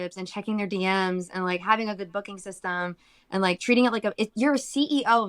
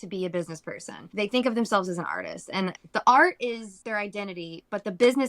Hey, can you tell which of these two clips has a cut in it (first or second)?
second